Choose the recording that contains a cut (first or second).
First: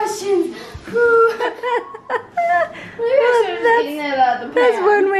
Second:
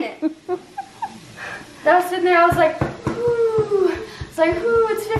first